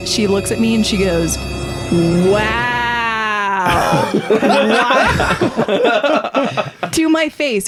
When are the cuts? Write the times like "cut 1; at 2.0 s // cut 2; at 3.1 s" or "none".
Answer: none